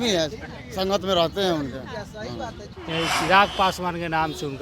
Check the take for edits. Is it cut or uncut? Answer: cut